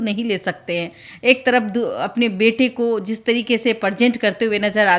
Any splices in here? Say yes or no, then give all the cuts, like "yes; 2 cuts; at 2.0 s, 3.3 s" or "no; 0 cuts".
no; 0 cuts